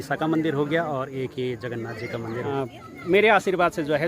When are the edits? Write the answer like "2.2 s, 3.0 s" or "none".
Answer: 2.5 s